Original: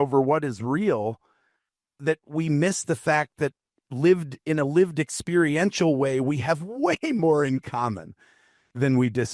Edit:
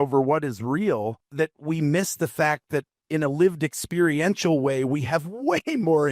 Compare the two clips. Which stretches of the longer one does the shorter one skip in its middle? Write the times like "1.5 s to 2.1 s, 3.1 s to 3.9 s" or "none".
1.2 s to 1.9 s, 3.6 s to 4.3 s